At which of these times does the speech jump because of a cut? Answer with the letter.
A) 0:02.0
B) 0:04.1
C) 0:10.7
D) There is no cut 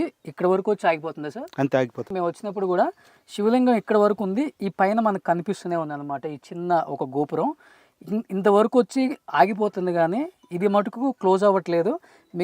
D